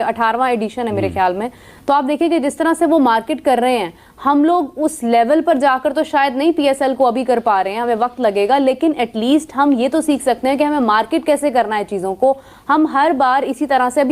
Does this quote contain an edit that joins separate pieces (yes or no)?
no